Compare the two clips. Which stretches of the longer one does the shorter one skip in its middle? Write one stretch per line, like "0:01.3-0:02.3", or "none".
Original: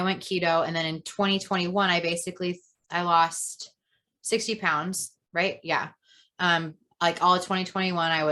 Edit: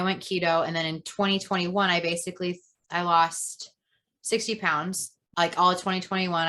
0:05.2-0:06.8